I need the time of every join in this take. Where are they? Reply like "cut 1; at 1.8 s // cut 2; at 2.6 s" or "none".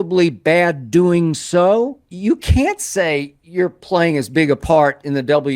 cut 1; at 2.1 s